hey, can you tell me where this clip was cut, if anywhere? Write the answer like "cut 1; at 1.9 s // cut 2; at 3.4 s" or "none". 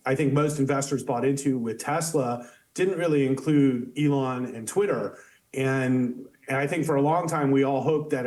none